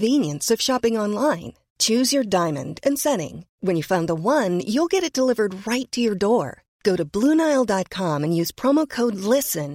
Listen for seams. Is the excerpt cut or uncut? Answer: uncut